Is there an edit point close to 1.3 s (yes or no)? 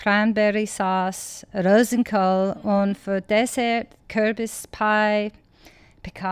no